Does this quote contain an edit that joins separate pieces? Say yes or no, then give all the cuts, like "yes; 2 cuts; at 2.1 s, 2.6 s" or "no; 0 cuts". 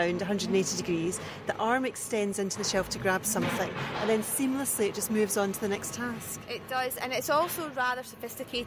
no; 0 cuts